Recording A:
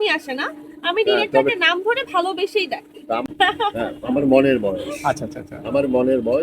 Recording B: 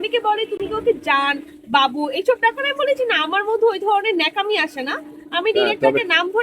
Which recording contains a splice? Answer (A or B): A